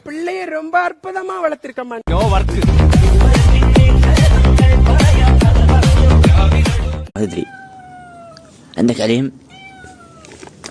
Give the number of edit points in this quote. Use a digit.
0